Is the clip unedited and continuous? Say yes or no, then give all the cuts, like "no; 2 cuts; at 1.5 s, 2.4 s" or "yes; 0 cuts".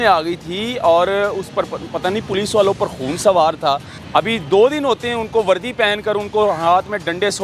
no; 1 cut; at 3.9 s